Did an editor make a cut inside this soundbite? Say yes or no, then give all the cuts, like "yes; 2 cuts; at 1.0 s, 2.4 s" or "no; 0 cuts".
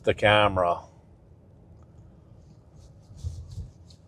no; 0 cuts